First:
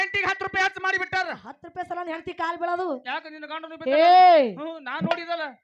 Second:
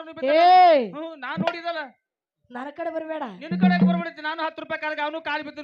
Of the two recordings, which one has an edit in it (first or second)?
first